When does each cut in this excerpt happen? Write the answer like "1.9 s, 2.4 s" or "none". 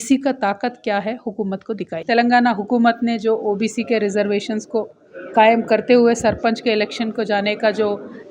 2.0 s